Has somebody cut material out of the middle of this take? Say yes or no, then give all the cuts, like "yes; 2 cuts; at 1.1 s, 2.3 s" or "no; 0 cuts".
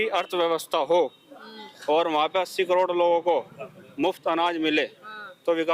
no; 0 cuts